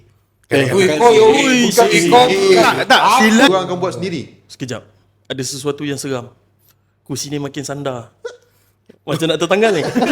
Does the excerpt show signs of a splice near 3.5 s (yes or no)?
yes